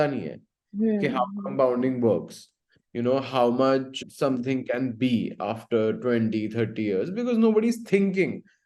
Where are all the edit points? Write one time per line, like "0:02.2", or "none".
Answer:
none